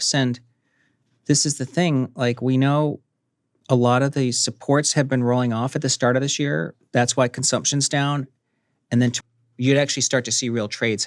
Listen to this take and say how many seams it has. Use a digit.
1